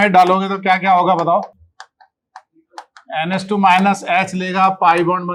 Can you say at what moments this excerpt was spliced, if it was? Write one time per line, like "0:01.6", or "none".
none